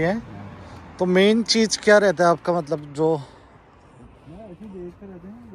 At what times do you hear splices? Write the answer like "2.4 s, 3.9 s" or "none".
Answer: none